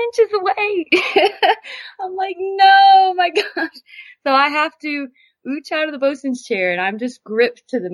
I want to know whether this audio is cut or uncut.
uncut